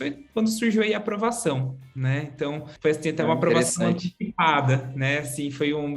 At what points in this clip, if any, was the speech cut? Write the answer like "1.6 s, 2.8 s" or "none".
2.7 s